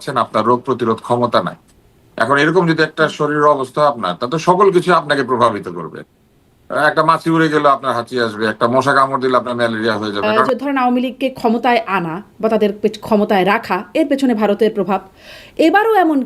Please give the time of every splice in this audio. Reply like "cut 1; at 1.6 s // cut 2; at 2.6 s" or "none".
cut 1; at 10.2 s